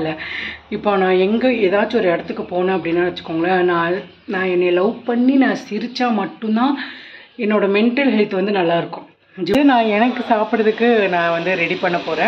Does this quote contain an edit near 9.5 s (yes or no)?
yes